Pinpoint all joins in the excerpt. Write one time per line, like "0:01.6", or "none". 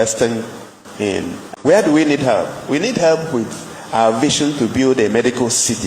0:01.4